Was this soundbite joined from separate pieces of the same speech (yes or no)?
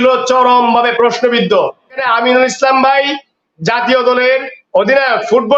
yes